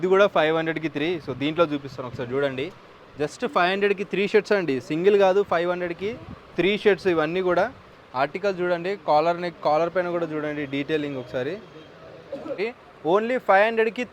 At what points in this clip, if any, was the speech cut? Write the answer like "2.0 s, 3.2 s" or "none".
12.6 s